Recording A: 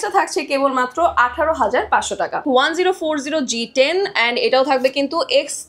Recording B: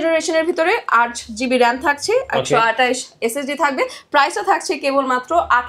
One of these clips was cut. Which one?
A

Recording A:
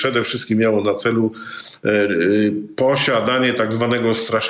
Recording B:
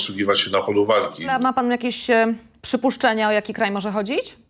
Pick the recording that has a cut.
B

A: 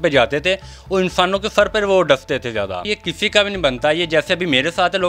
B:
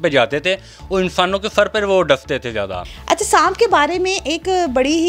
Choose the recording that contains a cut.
A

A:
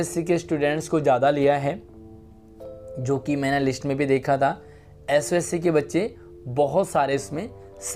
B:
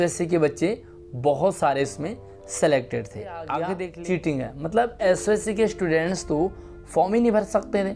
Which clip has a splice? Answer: B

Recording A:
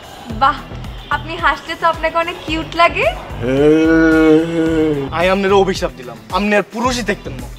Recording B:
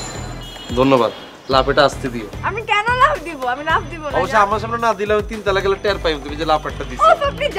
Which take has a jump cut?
A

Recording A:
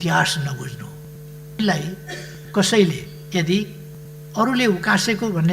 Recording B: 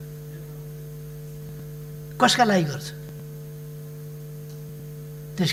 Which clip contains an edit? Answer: A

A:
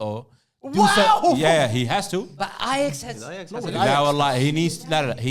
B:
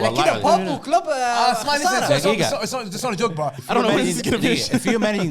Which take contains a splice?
B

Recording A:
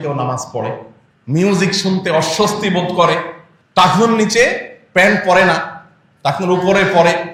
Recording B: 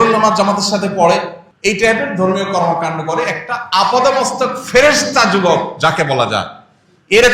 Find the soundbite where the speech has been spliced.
B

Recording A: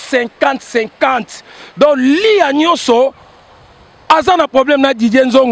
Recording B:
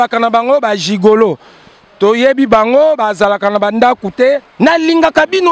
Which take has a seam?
B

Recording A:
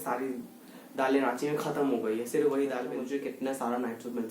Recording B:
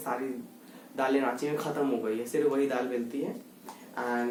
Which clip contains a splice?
A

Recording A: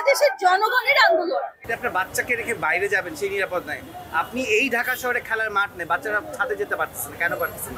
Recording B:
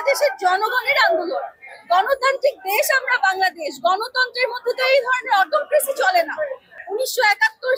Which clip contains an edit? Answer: A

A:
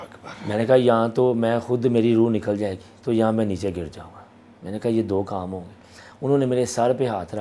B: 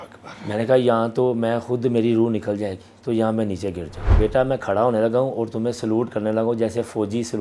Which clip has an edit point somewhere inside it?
B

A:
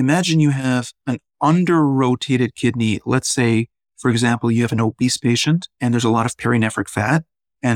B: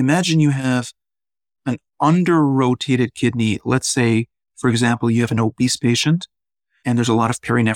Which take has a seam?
A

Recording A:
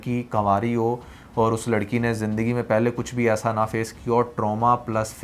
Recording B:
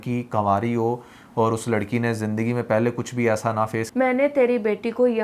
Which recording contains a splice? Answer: B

